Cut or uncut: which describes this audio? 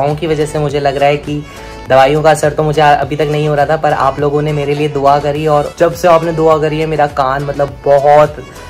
cut